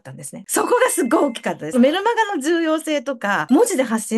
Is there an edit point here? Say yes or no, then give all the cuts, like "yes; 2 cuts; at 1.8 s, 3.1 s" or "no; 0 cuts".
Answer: no; 0 cuts